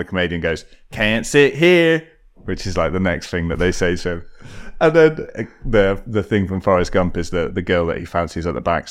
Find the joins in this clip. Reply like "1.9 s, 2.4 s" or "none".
none